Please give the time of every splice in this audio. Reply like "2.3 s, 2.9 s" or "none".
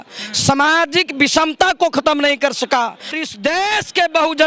3.1 s